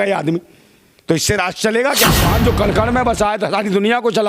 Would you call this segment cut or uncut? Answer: cut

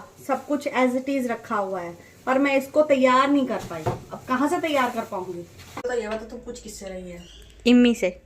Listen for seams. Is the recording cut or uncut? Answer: cut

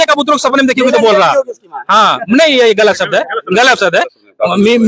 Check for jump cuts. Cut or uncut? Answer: uncut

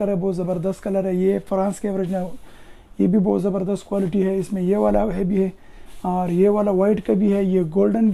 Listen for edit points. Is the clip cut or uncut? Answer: uncut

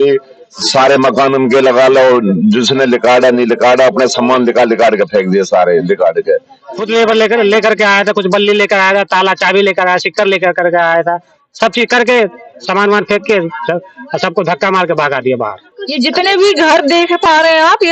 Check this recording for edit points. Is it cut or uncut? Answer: cut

